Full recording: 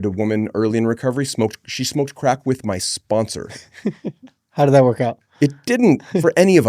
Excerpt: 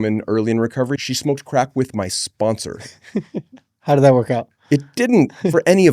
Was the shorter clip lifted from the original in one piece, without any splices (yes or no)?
no